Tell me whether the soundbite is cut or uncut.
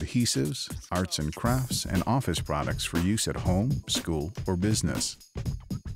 cut